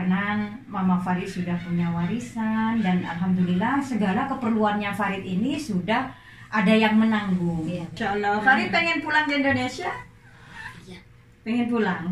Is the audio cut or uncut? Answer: cut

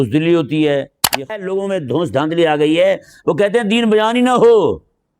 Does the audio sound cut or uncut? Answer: cut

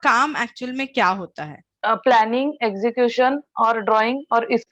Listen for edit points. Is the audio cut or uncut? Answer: cut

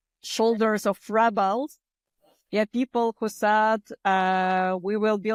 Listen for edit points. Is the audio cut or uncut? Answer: uncut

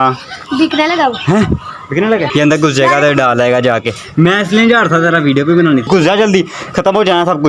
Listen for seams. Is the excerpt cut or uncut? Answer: cut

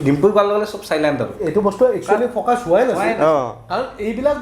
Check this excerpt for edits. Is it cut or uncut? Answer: cut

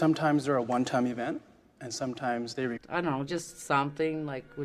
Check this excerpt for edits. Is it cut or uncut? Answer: uncut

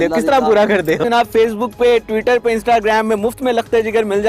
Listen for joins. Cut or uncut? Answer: cut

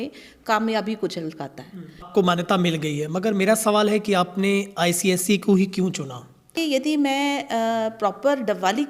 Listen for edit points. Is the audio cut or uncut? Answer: cut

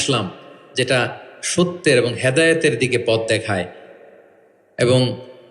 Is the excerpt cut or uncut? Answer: uncut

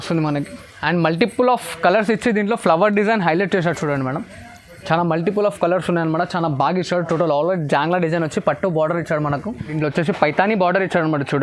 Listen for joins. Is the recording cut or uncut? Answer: cut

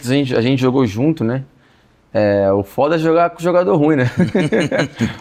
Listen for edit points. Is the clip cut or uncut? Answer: uncut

